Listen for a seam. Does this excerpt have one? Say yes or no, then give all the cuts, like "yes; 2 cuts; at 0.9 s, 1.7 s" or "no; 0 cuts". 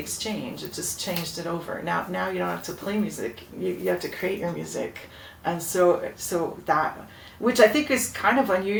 no; 0 cuts